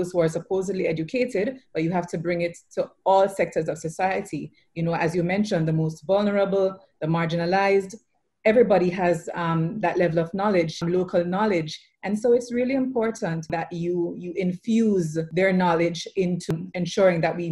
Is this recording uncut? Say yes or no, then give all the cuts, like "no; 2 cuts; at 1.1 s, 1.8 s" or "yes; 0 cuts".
no; 4 cuts; at 10.8 s, 13.5 s, 15.2 s, 16.5 s